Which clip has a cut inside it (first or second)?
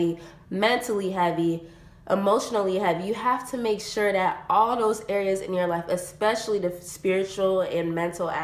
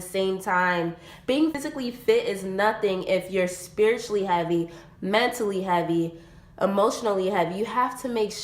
second